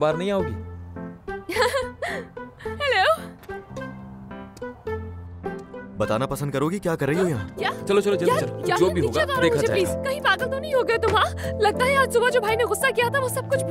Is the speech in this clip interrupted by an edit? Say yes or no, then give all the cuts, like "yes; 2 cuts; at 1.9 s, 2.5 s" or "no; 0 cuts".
yes; 2 cuts; at 5.8 s, 7.5 s